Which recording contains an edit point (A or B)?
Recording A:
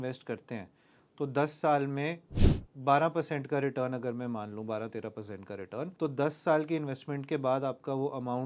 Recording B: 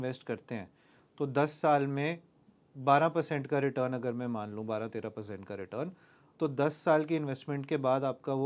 A